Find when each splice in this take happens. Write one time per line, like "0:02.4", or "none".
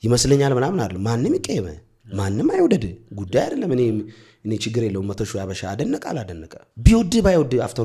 none